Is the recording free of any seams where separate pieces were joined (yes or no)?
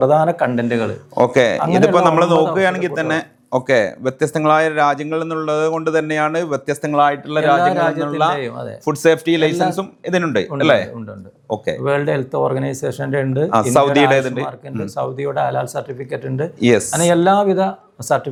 yes